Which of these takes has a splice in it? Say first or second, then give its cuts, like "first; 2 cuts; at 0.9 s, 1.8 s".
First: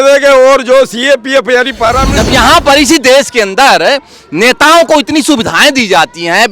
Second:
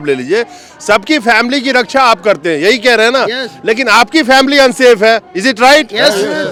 first; 1 cut; at 2.1 s